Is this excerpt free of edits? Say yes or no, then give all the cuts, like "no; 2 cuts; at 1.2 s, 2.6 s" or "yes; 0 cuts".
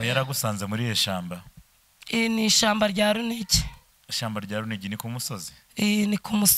yes; 0 cuts